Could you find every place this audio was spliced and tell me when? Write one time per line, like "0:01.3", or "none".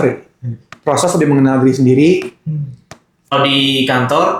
0:03.3

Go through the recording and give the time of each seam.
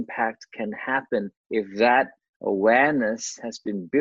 0:01.4

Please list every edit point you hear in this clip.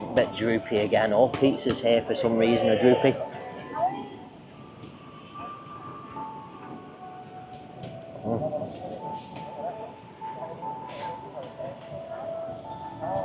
none

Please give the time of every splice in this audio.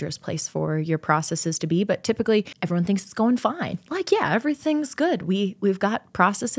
0:02.6

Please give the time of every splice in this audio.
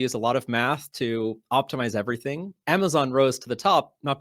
0:02.5

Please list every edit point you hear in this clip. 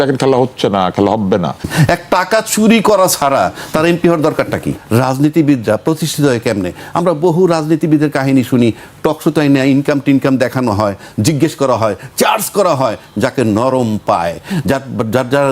0:01.7
0:04.8

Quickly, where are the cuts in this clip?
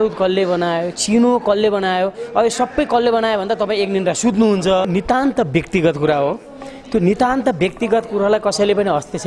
0:04.9

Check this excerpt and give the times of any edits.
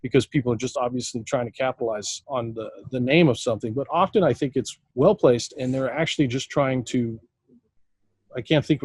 0:02.1
0:04.8

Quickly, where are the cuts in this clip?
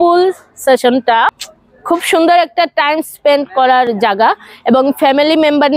0:01.4

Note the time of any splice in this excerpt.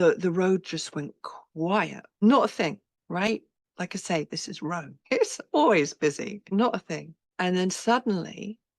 0:02.2
0:02.9
0:03.6
0:04.9
0:06.4
0:07.2

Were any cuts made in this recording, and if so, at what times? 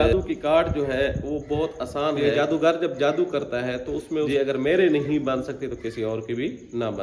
0:02.2
0:04.3

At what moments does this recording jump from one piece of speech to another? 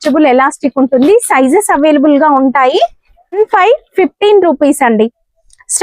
0:03.3

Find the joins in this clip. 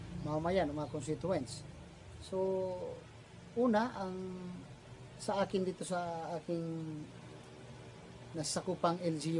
0:07.1

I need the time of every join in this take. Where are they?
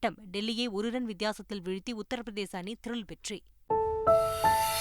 0:03.7

